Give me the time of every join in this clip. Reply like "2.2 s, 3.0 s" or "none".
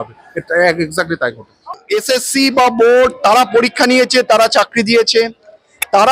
1.8 s